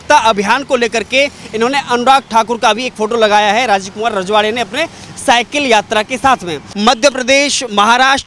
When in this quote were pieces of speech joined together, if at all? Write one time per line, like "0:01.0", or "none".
0:06.6